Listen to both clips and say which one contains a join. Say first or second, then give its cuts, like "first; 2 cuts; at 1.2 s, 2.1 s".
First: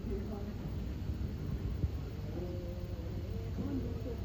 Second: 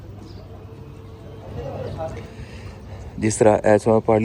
second; 1 cut; at 2.2 s